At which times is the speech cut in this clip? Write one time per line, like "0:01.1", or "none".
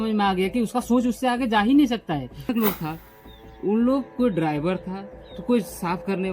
0:02.4